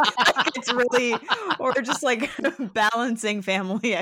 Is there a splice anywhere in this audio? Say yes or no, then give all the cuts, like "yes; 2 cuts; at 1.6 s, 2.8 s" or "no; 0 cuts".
no; 0 cuts